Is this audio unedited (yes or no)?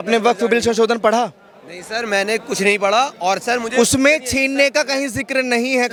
yes